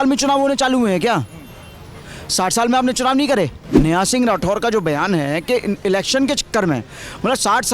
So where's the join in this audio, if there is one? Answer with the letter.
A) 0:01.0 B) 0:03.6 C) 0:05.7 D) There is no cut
B